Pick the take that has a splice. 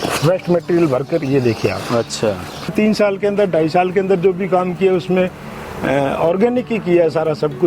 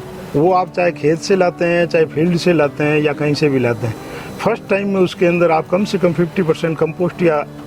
first; 1 cut; at 2.7 s

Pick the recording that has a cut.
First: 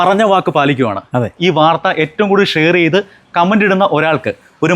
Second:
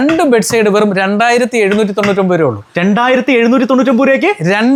first; 1 cut; at 1.4 s

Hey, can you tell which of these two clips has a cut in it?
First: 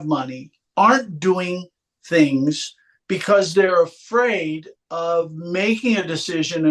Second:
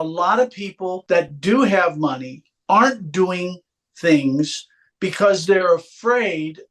second; 1 cut; at 1.0 s

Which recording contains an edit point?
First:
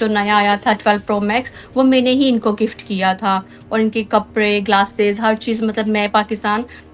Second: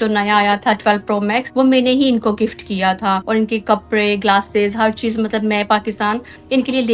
second; 2 cuts; at 1.5 s, 3.2 s

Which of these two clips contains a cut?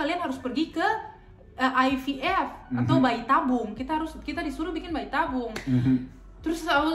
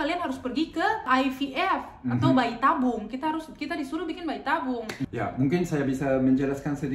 second; 2 cuts; at 1.1 s, 5.0 s

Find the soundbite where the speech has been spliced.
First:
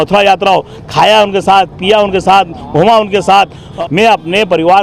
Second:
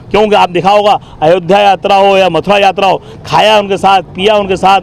first; 1 cut; at 3.7 s

